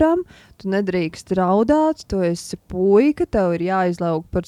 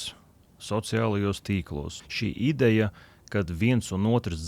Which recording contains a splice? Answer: second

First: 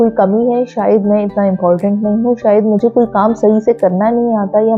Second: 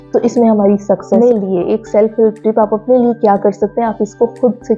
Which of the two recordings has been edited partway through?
second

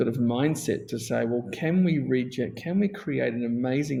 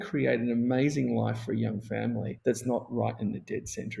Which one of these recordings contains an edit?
second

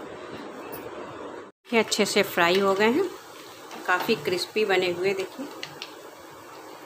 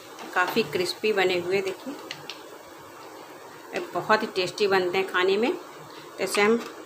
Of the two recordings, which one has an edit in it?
first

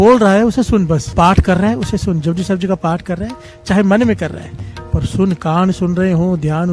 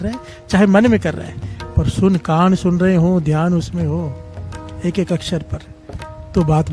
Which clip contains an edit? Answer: first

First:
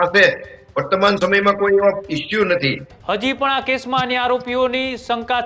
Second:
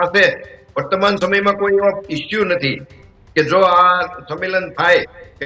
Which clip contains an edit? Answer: first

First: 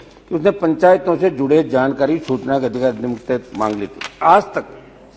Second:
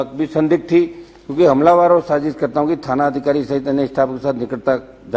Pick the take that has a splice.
first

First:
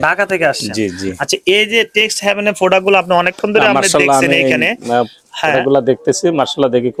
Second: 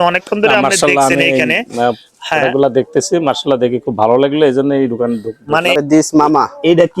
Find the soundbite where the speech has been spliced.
second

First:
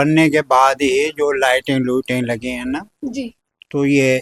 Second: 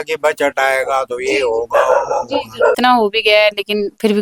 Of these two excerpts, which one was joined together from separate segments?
second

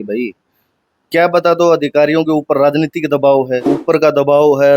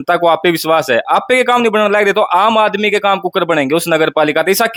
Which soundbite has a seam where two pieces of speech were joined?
first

